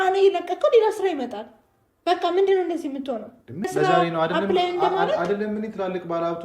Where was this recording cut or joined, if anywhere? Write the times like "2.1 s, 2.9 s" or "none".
3.7 s